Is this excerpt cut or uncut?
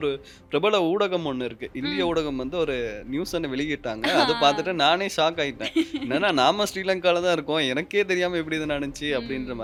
uncut